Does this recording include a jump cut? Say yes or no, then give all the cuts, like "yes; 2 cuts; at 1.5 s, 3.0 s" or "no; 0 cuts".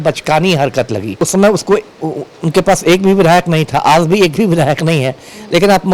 yes; 1 cut; at 1.1 s